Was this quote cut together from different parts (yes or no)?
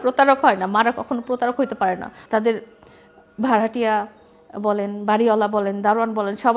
yes